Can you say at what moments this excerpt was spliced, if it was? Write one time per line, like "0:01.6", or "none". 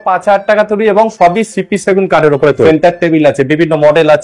0:02.5